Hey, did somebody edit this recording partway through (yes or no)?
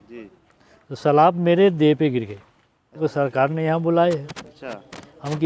yes